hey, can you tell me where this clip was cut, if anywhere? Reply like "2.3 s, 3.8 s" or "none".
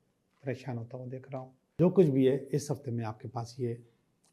1.8 s